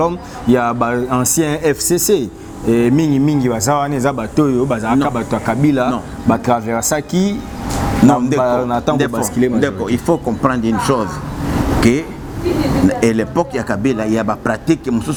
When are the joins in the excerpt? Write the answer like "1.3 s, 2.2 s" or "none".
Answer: none

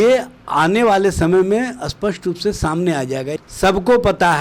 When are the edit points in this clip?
3.3 s

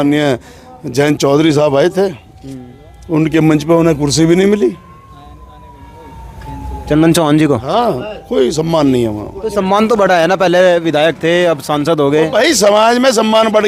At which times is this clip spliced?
none

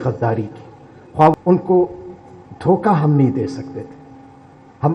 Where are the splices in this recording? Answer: 1.3 s

